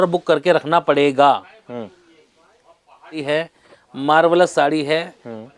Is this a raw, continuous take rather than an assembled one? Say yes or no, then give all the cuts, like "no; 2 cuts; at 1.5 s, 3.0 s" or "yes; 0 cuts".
no; 1 cut; at 3.2 s